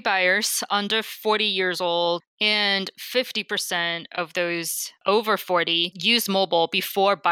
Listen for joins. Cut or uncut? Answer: cut